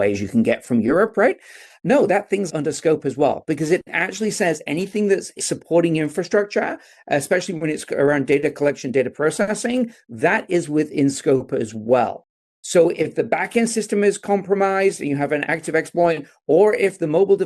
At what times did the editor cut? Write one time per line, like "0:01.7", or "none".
0:01.7
0:02.5
0:05.4